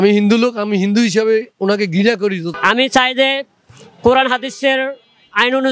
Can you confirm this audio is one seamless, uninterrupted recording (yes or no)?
no